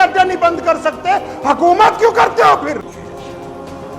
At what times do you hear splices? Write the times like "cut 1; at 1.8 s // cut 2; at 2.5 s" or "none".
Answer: cut 1; at 2.9 s